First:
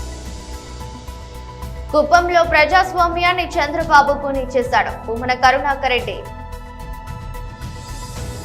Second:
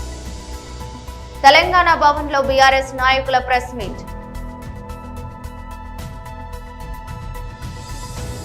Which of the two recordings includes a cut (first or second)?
first